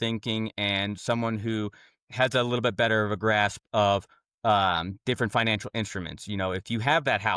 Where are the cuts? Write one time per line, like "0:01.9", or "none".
none